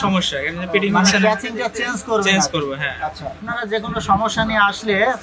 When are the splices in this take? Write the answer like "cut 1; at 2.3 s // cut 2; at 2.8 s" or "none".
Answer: cut 1; at 3.5 s